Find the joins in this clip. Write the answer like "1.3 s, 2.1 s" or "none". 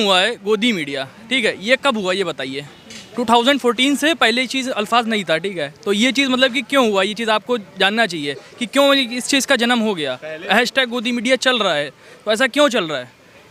none